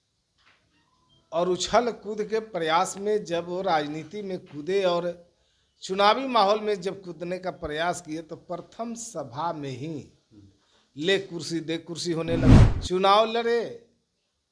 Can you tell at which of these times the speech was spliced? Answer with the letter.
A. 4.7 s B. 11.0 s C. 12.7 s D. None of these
C